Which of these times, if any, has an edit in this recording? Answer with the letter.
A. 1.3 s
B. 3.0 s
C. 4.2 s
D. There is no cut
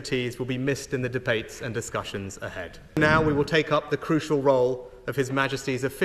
B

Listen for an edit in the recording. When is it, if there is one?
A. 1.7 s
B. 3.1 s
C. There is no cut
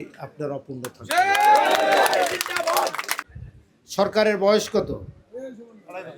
B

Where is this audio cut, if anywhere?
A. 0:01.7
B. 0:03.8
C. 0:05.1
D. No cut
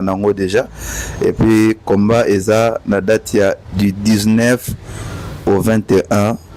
D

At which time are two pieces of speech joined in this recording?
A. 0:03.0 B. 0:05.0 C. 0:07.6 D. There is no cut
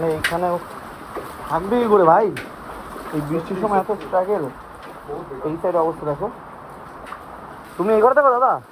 C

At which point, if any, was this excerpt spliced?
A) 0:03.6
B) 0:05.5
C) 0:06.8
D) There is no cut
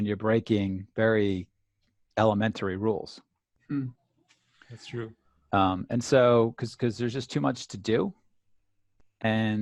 D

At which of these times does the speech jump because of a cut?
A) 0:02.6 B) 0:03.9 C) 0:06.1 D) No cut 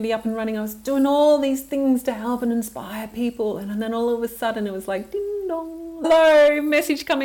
C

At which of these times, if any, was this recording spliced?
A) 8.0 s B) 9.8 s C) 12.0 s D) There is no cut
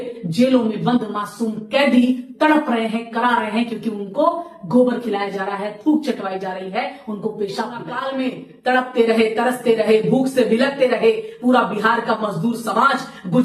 A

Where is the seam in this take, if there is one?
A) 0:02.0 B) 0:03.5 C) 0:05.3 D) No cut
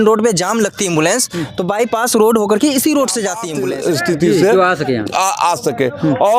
B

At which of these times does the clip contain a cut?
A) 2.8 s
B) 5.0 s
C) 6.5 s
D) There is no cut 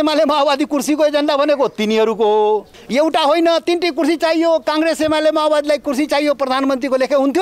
A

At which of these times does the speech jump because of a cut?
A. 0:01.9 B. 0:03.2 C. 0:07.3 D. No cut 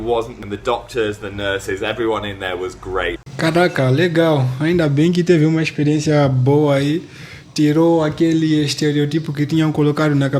B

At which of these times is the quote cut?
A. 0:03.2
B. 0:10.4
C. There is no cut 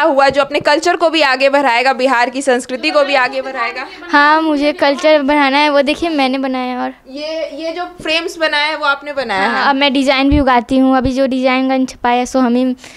C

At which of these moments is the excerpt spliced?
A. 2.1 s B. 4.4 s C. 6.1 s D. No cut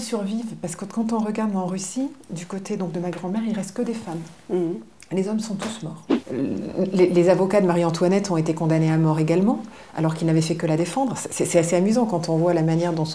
C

